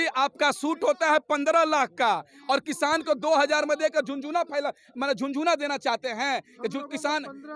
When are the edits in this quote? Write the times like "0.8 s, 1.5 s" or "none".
none